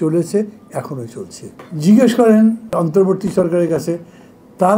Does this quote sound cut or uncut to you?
uncut